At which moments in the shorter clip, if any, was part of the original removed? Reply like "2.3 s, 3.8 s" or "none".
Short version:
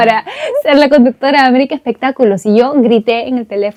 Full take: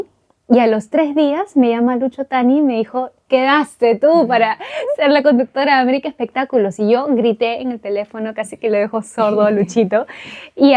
none

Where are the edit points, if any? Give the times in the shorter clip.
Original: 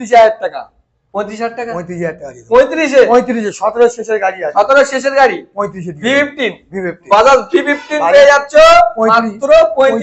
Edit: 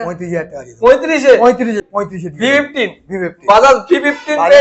1.8 s

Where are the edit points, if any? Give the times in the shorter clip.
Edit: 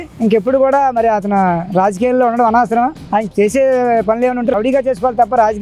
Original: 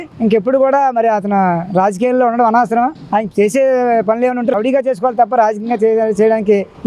none

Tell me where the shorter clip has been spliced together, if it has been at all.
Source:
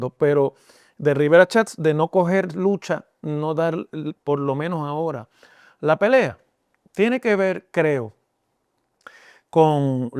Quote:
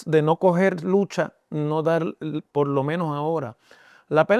none

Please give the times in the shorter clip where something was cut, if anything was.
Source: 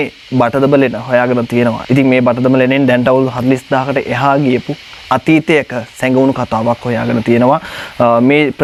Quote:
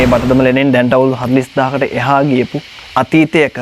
none

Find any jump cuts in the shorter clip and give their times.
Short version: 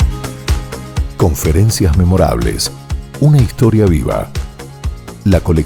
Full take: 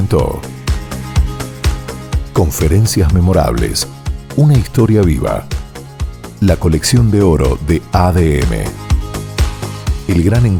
none

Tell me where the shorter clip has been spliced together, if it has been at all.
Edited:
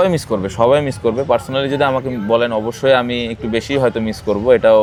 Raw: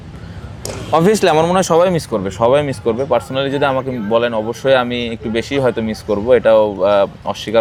none

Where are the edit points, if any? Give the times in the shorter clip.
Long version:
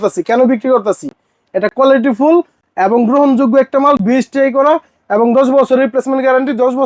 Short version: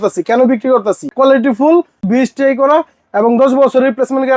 1.1 s, 2.0 s

